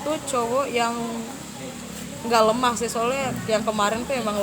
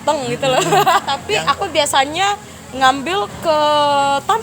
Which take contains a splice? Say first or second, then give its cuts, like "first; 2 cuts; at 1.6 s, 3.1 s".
second; 1 cut; at 1.2 s